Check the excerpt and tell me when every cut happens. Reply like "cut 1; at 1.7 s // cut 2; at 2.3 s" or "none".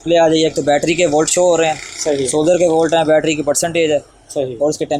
none